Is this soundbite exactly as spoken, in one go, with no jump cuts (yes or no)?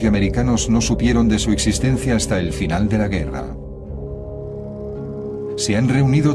no